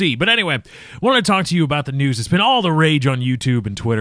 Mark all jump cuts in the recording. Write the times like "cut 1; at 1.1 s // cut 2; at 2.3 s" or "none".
cut 1; at 1.8 s